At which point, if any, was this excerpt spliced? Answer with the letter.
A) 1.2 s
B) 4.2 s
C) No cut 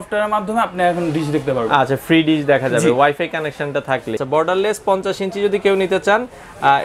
B